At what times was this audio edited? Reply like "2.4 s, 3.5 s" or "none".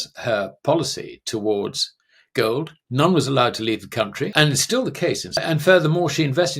4.3 s, 5.4 s